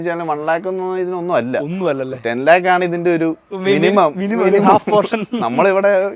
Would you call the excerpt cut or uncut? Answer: uncut